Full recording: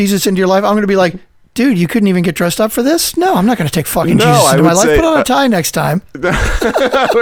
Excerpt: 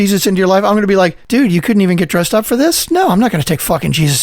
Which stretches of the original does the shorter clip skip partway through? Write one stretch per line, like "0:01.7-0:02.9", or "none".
0:01.2-0:01.5